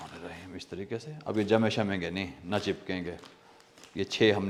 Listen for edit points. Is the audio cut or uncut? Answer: uncut